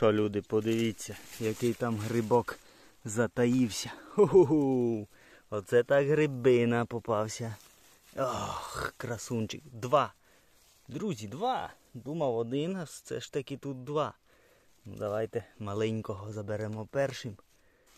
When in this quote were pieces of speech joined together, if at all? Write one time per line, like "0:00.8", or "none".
none